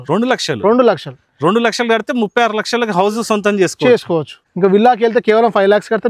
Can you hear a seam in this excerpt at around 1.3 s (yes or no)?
no